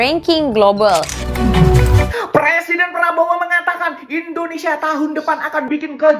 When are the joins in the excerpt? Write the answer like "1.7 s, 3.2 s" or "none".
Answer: 2.1 s